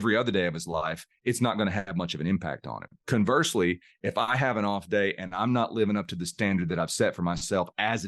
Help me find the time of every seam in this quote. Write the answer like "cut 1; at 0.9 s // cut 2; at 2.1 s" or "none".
cut 1; at 2.9 s